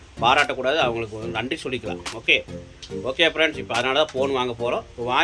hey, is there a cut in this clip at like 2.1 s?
no; 0 cuts

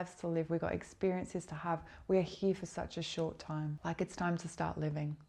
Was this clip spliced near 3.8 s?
yes; 1 cut; at 3.8 s

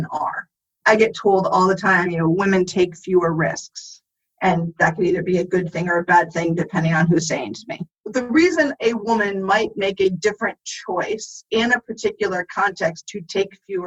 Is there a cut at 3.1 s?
no; 1 cut; at 8.0 s

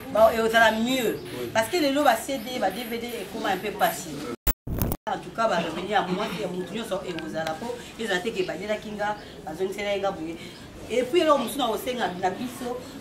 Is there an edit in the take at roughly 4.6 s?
yes; 1 cut; at 4.6 s

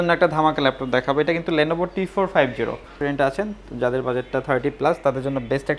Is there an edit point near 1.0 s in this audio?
no; 1 cut; at 2.9 s

